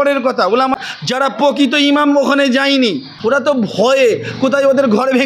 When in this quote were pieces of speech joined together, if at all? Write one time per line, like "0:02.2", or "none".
0:00.8
0:03.1